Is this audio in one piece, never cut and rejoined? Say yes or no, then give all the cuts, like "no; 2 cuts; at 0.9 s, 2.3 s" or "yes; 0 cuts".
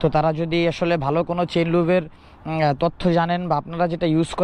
yes; 0 cuts